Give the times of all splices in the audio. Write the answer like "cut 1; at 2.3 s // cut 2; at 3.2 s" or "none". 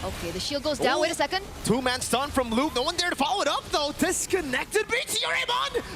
none